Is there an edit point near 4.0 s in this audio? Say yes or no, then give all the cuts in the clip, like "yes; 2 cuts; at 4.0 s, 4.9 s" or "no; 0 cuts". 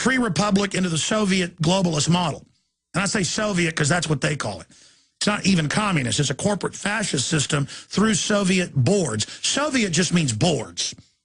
yes; 1 cut; at 4.0 s